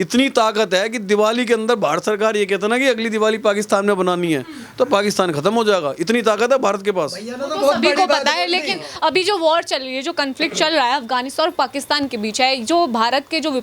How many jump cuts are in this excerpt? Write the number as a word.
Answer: zero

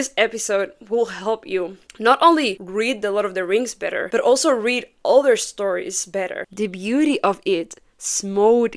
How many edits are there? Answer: three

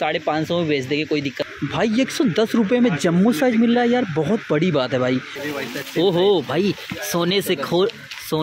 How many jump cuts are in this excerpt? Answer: two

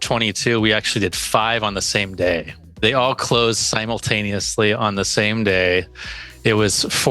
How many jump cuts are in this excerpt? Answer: one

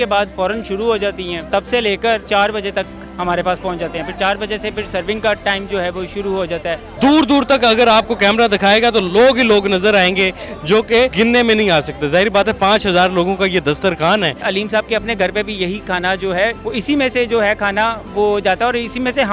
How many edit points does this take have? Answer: six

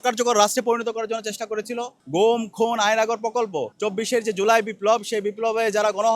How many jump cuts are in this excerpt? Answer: two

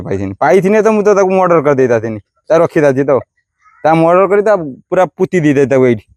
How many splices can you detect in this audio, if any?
zero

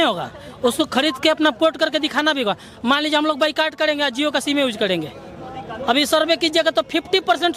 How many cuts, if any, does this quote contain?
zero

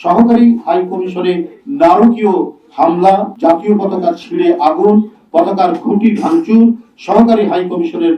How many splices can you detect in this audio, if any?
one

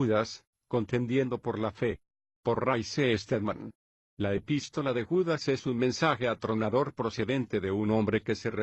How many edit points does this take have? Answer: one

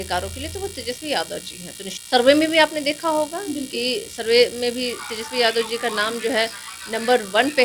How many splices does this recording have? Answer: one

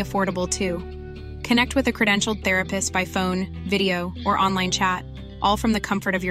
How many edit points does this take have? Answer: zero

